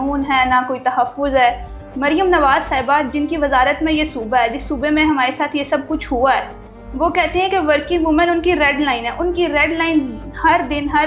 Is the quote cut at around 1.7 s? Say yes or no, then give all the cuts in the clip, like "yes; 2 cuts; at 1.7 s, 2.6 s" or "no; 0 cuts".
no; 0 cuts